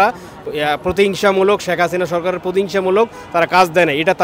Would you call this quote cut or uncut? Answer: uncut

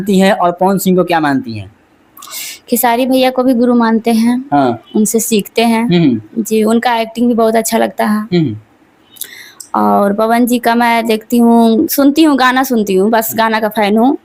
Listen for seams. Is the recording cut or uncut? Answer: uncut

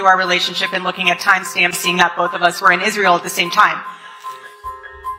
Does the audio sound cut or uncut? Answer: uncut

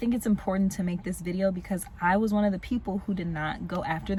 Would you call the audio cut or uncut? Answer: uncut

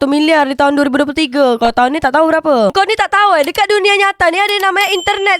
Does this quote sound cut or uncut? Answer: cut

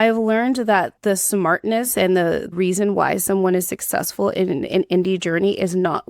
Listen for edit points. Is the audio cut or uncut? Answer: cut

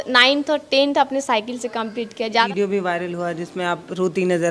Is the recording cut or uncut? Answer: cut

